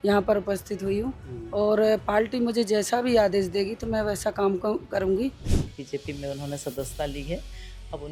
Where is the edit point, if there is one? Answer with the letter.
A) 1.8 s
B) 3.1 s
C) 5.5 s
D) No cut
C